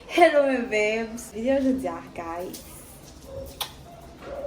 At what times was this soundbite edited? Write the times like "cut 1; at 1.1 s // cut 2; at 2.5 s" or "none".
cut 1; at 1.3 s